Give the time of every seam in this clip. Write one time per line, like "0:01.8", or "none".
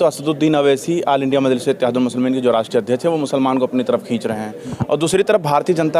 none